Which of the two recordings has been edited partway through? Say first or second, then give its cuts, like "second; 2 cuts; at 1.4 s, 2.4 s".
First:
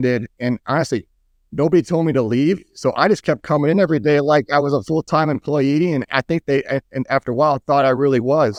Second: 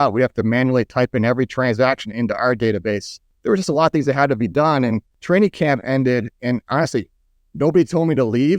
second; 2 cuts; at 3.1 s, 5.1 s